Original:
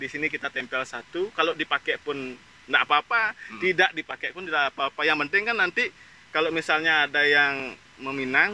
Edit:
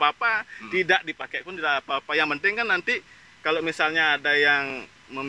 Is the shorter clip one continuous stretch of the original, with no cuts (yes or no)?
yes